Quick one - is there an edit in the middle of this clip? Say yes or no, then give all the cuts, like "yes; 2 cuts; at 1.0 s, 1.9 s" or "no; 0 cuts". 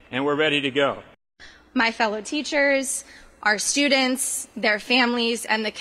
yes; 1 cut; at 1.1 s